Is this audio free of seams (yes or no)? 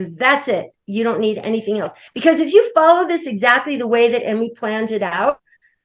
yes